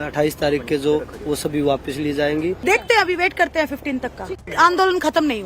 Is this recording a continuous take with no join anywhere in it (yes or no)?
no